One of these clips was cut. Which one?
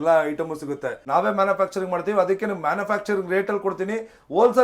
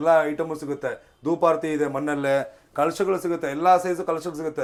first; 1 cut; at 0.9 s

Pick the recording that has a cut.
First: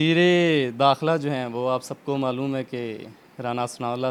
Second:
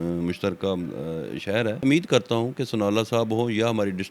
second; 1 cut; at 1.8 s

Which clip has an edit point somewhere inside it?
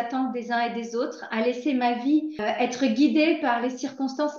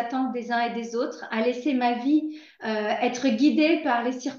first; 1 cut; at 2.4 s

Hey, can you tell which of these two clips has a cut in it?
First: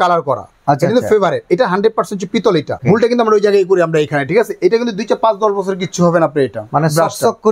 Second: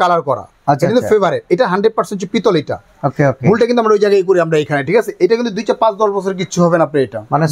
first; 1 cut; at 2.8 s

